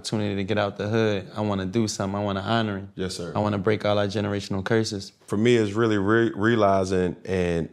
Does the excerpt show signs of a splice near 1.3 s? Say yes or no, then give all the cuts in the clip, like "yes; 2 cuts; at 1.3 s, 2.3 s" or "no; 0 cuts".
no; 1 cut; at 5.3 s